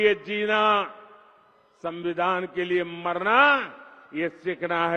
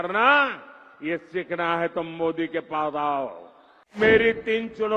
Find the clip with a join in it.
second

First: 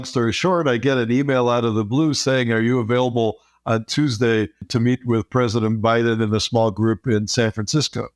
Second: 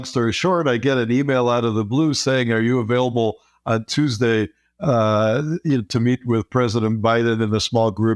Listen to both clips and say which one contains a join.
first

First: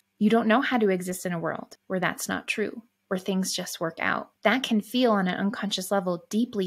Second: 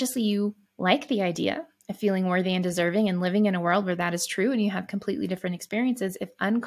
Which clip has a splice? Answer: first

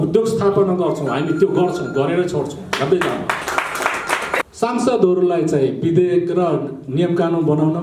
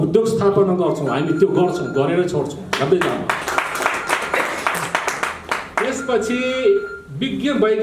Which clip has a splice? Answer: first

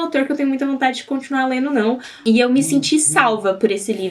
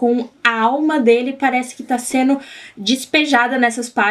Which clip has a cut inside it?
first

